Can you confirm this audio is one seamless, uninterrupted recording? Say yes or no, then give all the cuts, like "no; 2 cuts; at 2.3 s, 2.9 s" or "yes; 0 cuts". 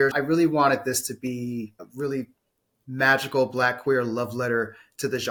yes; 0 cuts